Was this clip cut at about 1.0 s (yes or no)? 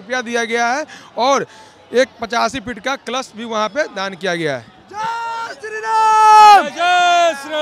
no